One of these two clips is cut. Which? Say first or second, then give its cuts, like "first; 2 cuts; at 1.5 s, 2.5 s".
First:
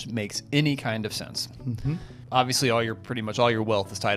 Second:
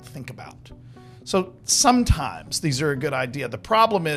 first; 1 cut; at 2.1 s